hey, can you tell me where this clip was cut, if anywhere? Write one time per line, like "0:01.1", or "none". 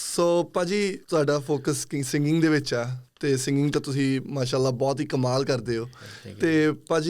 0:01.0